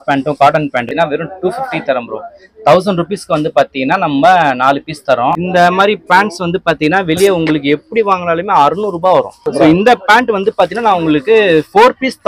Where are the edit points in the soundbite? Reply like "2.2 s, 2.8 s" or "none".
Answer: 0.9 s, 5.4 s, 9.4 s